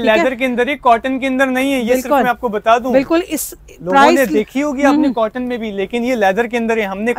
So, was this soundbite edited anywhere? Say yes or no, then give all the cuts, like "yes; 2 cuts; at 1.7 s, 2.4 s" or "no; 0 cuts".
no; 0 cuts